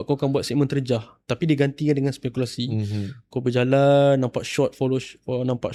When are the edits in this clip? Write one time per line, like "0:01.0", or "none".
none